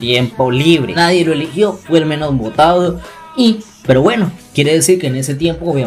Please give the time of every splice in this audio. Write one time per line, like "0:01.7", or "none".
0:01.0